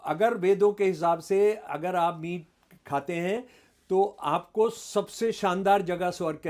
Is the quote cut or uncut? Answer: uncut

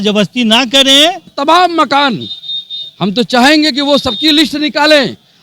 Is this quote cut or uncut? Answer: cut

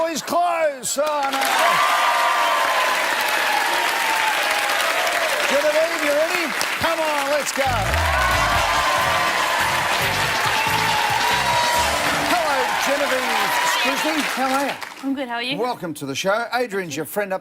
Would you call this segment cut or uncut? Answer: cut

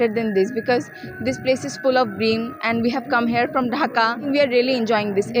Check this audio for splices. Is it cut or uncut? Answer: cut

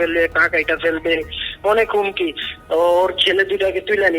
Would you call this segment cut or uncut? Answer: cut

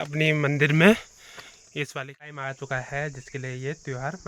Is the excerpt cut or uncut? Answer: cut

